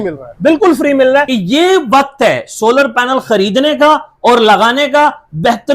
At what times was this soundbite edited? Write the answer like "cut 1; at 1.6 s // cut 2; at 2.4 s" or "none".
cut 1; at 1.3 s